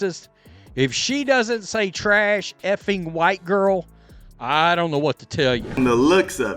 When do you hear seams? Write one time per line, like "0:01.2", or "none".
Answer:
0:05.7